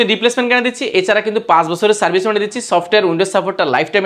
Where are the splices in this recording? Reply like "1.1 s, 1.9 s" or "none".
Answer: none

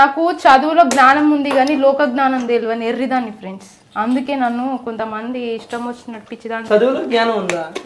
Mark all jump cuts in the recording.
none

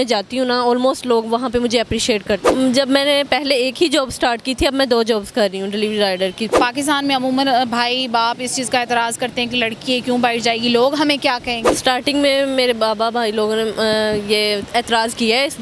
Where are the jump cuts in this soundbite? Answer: 2.5 s, 6.6 s, 11.6 s

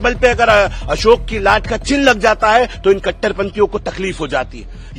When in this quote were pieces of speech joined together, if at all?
none

